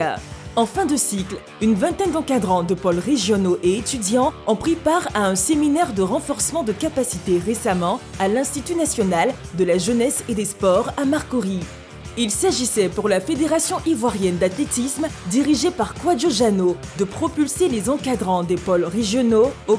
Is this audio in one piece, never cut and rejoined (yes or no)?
yes